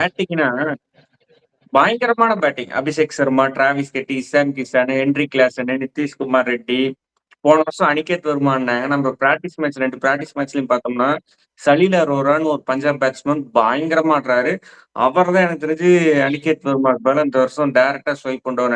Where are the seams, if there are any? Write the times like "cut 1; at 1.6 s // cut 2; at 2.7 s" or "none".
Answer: none